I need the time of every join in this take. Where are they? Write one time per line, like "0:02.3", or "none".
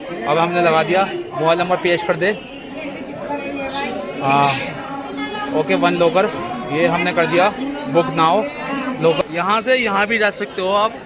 0:09.2